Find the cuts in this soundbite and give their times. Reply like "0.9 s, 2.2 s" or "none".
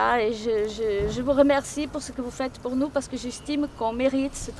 none